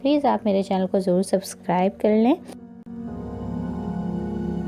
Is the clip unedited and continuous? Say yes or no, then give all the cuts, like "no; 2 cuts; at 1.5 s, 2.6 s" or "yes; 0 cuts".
no; 1 cut; at 2.6 s